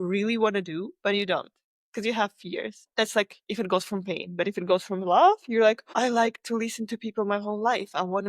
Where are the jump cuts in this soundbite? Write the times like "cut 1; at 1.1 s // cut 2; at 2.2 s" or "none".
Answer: cut 1; at 2.9 s // cut 2; at 5.8 s